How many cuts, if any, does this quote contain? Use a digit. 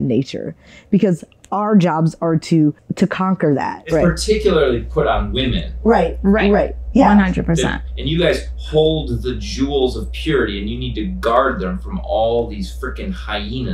3